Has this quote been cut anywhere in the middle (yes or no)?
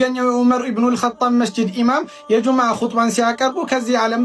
no